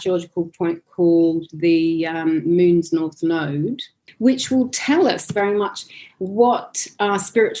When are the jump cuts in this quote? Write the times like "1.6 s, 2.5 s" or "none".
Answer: none